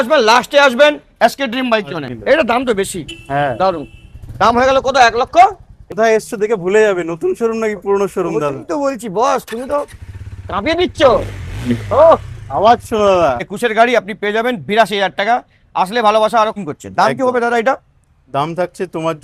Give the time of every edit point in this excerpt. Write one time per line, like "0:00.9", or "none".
0:02.0
0:05.9
0:13.5
0:16.5